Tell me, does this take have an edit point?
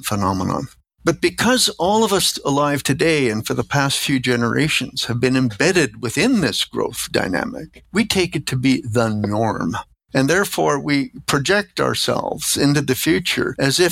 no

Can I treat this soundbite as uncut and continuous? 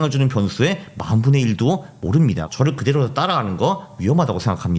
no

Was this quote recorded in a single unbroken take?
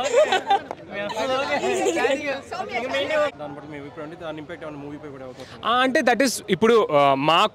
yes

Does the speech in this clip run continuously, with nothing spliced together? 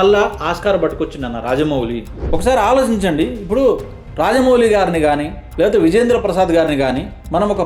no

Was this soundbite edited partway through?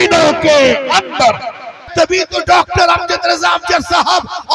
yes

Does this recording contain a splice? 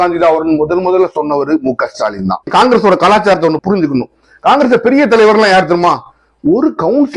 yes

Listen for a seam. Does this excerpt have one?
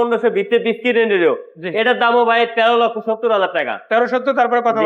no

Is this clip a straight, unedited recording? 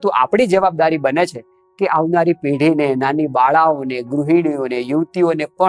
yes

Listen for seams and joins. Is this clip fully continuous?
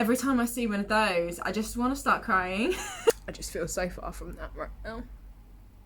no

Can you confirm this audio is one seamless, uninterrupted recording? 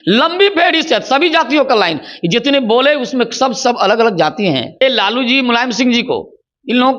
no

